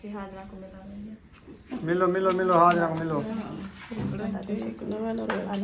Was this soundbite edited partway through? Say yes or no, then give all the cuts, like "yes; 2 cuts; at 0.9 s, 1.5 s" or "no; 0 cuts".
no; 0 cuts